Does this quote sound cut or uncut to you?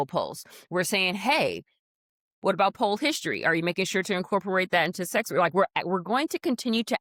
uncut